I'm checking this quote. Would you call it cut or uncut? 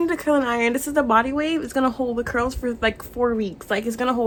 uncut